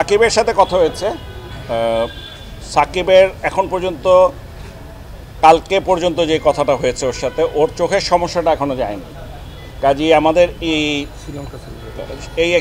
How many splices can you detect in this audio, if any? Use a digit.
0